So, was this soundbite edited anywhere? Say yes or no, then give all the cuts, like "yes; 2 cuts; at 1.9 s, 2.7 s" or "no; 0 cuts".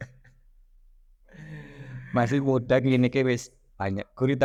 no; 0 cuts